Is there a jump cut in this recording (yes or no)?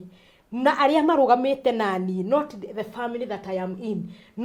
no